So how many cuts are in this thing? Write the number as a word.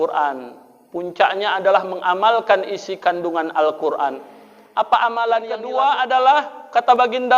one